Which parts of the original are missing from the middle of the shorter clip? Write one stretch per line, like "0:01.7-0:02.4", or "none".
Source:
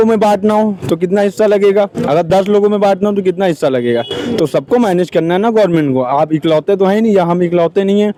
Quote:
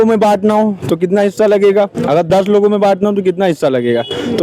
none